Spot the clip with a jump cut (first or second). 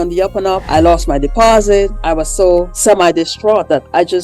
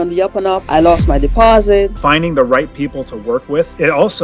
second